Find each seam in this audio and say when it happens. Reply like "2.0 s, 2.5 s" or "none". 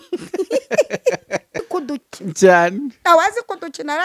1.7 s